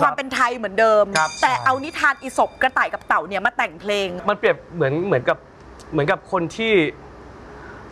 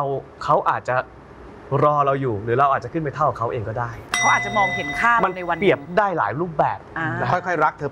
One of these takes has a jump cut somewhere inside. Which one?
first; 1 cut; at 4.2 s

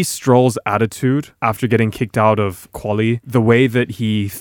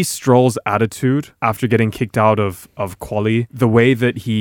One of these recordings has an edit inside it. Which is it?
first; 1 cut; at 2.7 s

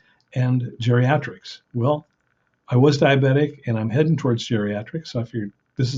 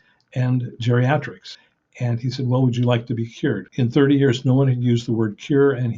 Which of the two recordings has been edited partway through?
second; 2 cuts; at 1.6 s, 3.7 s

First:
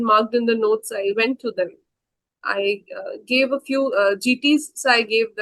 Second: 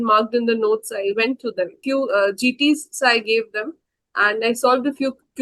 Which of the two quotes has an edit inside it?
second; 1 cut; at 1.8 s

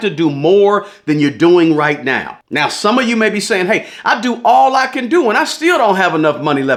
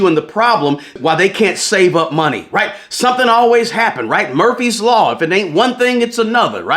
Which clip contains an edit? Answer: second; 1 cut; at 1.0 s

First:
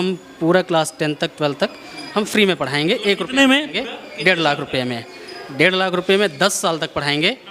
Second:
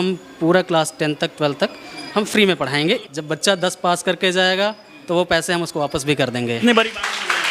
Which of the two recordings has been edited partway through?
second; 2 cuts; at 3.0 s, 6.6 s

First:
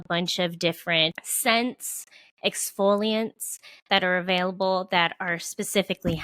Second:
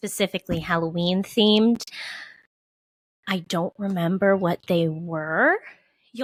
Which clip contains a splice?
first; 1 cut; at 1.2 s

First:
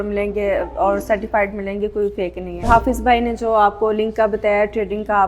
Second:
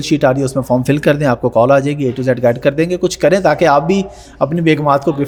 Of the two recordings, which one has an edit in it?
first; 1 cut; at 2.7 s

